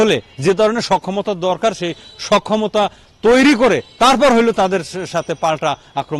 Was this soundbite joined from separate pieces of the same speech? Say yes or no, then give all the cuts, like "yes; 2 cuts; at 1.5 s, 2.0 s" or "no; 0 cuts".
no; 0 cuts